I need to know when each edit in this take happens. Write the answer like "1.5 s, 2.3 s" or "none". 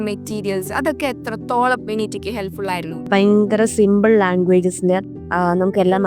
3.1 s, 5.2 s